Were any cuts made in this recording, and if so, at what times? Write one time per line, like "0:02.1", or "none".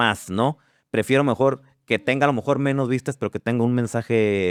none